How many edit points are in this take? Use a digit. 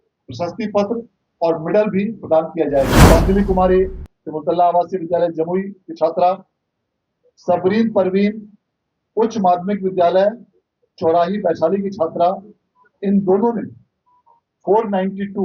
1